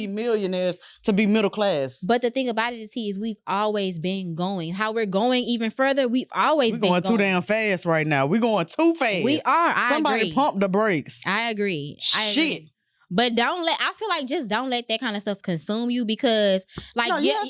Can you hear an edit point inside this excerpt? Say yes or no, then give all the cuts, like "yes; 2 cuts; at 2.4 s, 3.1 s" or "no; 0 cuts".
no; 0 cuts